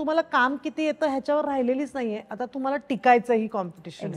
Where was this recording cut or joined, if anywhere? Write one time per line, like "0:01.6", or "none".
none